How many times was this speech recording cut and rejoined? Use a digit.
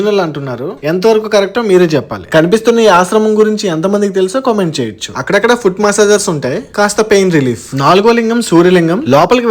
0